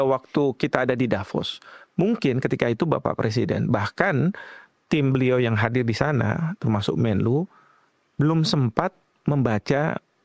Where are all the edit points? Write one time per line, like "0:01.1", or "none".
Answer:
none